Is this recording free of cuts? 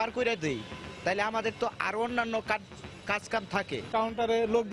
yes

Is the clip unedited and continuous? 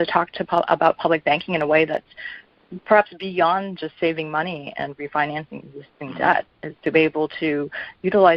yes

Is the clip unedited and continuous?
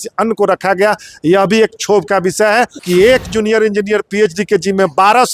no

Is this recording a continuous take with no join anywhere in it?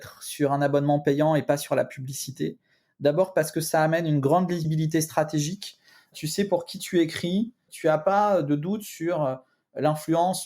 no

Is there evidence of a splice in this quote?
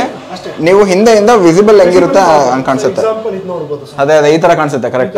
no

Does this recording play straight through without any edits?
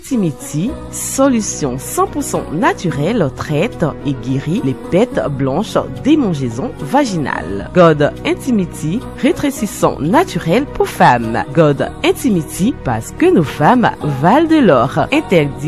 yes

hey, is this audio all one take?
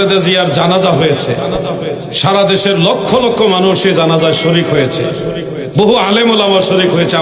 yes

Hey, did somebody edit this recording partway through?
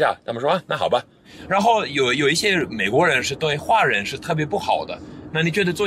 yes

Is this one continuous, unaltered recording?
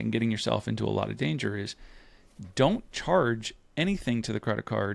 yes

